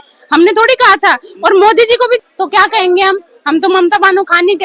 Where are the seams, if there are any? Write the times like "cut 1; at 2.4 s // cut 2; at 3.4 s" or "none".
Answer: cut 1; at 2.2 s